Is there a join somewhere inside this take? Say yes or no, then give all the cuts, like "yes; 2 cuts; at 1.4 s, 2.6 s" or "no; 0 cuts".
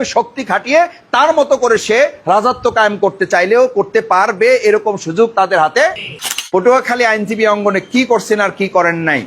yes; 1 cut; at 6.2 s